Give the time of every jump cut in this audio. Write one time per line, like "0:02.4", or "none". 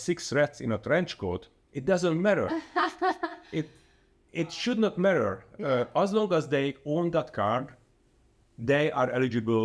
none